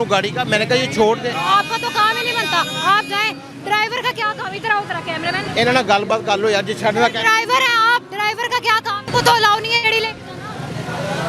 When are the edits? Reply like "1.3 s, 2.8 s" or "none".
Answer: 5.5 s, 9.1 s

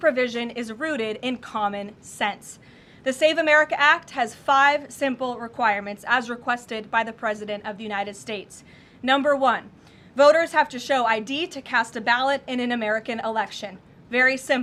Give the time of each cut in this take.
none

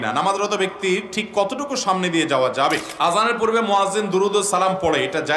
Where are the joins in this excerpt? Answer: 3.2 s

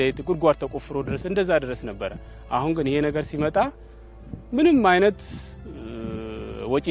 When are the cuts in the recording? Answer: none

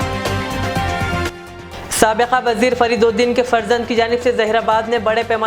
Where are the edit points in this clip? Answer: 1.2 s

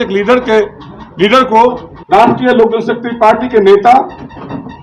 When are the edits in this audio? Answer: 1.9 s

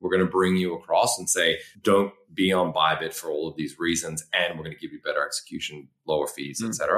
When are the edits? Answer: 1.7 s

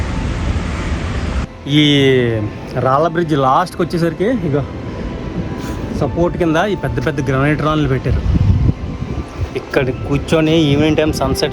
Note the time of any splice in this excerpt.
1.5 s

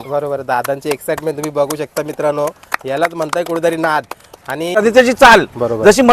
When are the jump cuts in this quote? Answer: 4.8 s

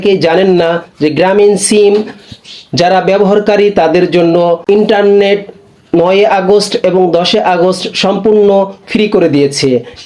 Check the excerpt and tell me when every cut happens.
4.6 s

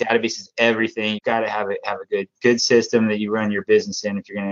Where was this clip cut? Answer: 1.2 s

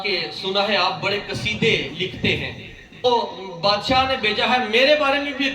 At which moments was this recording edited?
3.0 s

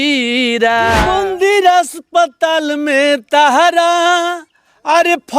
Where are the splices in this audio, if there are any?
1.1 s

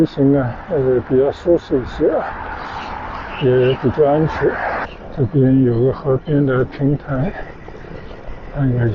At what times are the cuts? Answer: 4.8 s

